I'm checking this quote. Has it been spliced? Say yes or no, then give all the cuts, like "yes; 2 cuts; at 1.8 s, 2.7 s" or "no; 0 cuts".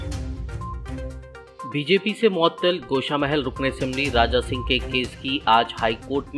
yes; 1 cut; at 1.1 s